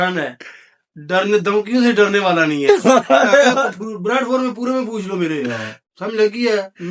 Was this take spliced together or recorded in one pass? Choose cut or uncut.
uncut